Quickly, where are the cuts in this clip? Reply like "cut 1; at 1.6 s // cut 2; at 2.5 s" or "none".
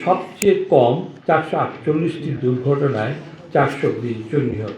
cut 1; at 1.1 s